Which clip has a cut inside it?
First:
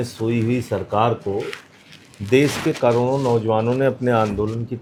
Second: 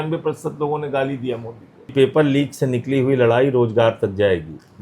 second; 1 cut; at 1.9 s

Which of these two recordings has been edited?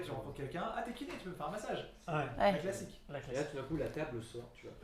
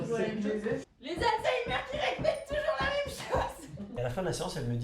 second; 2 cuts; at 0.8 s, 3.9 s

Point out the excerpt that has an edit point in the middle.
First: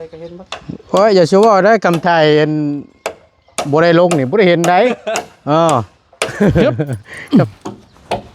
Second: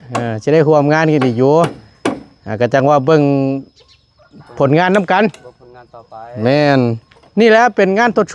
first; 1 cut; at 6.6 s

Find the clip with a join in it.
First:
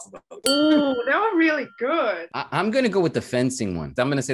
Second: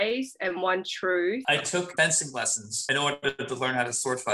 second; 1 cut; at 1.4 s

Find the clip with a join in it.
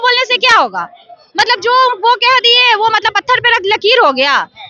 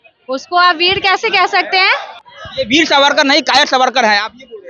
second; 1 cut; at 2.1 s

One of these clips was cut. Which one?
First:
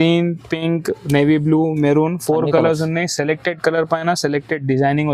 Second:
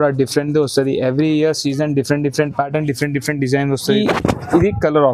second; 1 cut; at 3.9 s

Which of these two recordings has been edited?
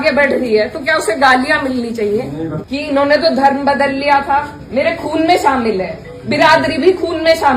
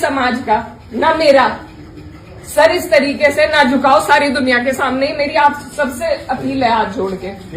first; 2 cuts; at 2.6 s, 4.6 s

